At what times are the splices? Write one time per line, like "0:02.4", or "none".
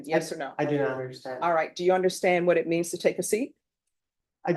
none